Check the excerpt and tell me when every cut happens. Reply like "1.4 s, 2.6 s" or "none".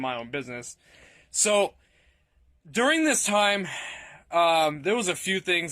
3.6 s